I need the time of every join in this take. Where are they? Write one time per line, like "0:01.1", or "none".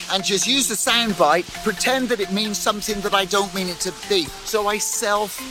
0:01.5
0:04.3